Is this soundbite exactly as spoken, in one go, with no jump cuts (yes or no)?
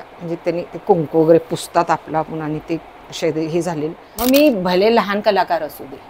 no